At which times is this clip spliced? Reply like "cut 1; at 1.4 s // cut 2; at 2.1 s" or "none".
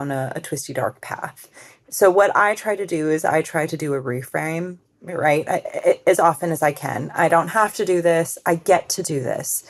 none

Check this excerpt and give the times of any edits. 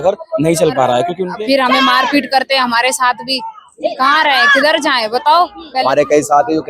cut 1; at 1.2 s // cut 2; at 5.7 s

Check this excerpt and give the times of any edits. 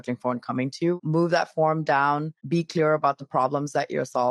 cut 1; at 1.0 s // cut 2; at 2.3 s

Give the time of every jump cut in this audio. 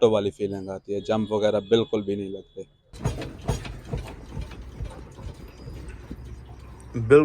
cut 1; at 2.9 s

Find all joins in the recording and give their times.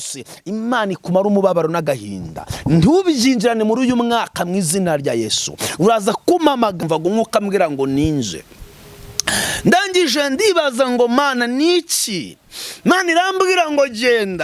cut 1; at 6.8 s

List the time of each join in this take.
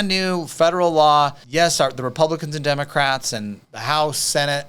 cut 1; at 1.4 s // cut 2; at 3.7 s

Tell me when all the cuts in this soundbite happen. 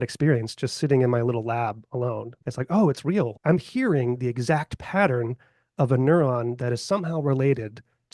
cut 1; at 2.3 s // cut 2; at 3.3 s

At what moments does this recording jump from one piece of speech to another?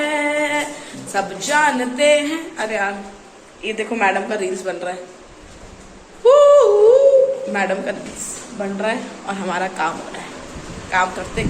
none

